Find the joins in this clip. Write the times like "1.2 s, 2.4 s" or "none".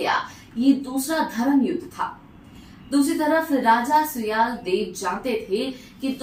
none